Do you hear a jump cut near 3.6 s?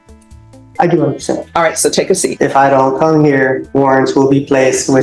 yes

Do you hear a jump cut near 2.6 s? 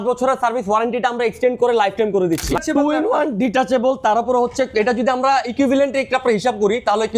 yes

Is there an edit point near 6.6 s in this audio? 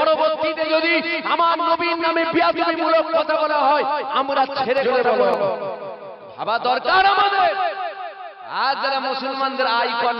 no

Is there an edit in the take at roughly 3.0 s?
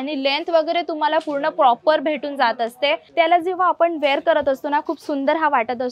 yes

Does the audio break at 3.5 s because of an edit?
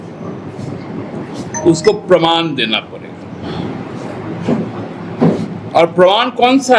no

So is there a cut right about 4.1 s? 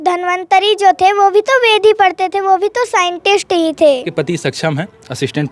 yes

